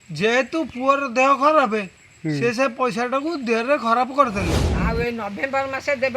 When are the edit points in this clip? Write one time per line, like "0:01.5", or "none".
0:04.7